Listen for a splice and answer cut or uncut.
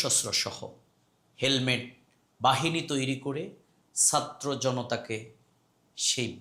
uncut